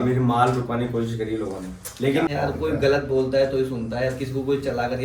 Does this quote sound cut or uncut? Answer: cut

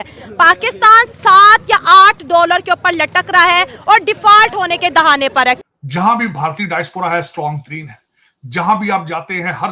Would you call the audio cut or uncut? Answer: cut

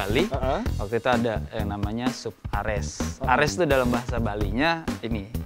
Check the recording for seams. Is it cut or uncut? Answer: uncut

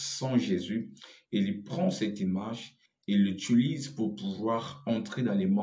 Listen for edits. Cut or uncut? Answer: uncut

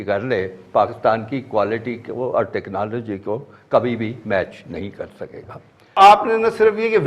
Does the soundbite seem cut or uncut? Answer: cut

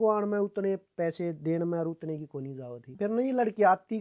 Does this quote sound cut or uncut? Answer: cut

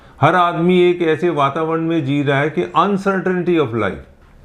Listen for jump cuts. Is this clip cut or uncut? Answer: uncut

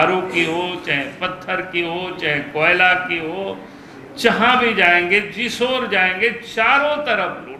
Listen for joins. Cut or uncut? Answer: uncut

